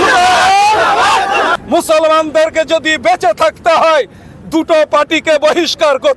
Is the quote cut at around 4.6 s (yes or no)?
no